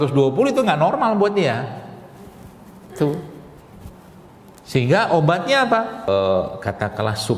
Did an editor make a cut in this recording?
yes; 1 cut; at 6.1 s

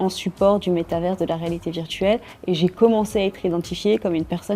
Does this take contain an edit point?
no; 0 cuts

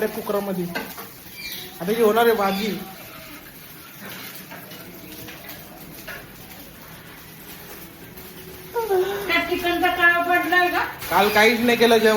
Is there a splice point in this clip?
yes; 1 cut; at 10.9 s

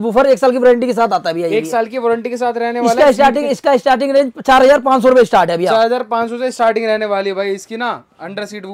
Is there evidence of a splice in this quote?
no; 0 cuts

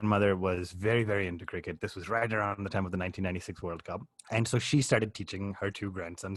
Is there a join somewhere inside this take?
no; 0 cuts

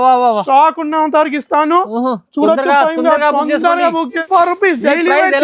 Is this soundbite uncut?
no; 1 cut; at 4.2 s

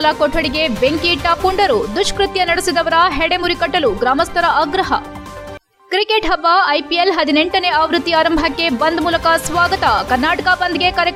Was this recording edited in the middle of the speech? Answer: no; 0 cuts

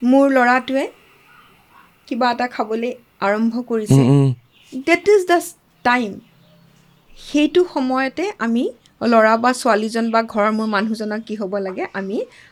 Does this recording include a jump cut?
no; 0 cuts

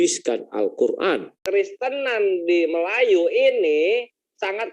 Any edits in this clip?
yes; 1 cut; at 1.4 s

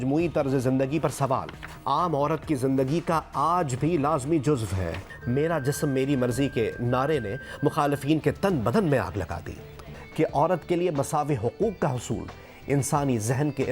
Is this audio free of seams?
no; 2 cuts; at 5.1 s, 10.0 s

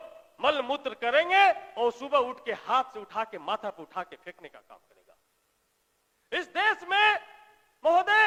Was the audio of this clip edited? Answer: no; 0 cuts

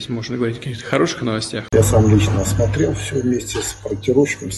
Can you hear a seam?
yes; 1 cut; at 1.6 s

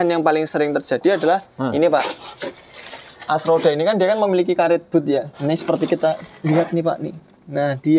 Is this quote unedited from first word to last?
yes; 0 cuts

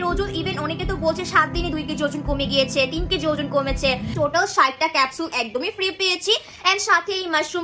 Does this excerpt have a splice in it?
yes; 1 cut; at 4.1 s

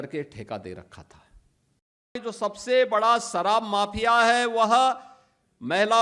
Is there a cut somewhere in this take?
yes; 1 cut; at 2.2 s

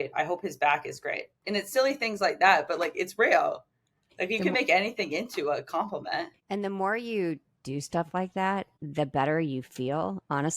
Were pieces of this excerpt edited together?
yes; 2 cuts; at 6.4 s, 8.8 s

